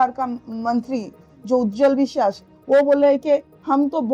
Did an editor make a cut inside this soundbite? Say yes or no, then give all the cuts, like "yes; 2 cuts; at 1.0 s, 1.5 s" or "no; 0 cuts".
no; 0 cuts